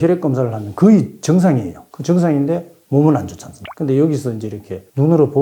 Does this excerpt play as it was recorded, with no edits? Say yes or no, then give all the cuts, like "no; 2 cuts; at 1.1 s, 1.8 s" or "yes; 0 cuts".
yes; 0 cuts